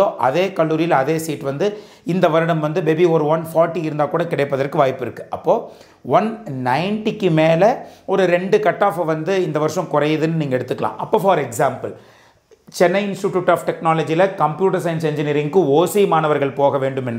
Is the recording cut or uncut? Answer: uncut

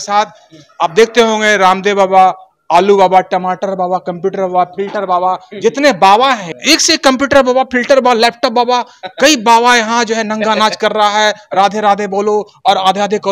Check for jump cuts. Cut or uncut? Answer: cut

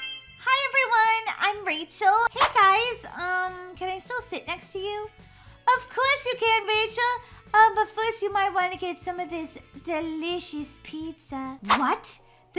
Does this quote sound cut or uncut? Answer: cut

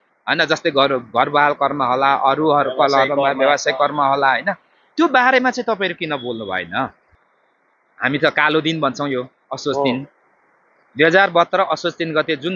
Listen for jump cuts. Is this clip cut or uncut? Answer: cut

